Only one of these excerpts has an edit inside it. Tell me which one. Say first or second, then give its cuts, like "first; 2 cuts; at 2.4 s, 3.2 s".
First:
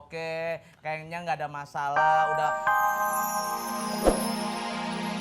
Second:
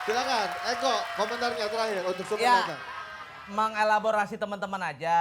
first; 1 cut; at 2.0 s